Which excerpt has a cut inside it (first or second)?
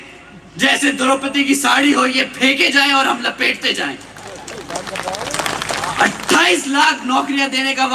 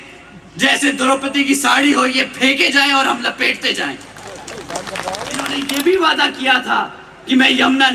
second